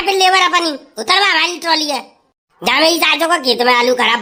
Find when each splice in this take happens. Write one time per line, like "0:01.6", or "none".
none